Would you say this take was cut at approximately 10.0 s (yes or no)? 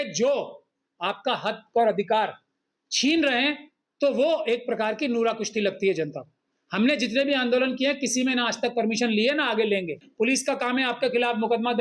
yes